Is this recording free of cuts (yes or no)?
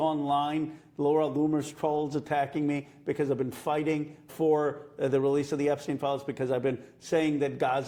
yes